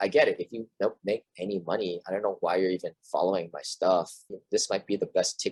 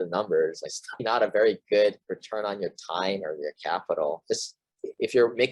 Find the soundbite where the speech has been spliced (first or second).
second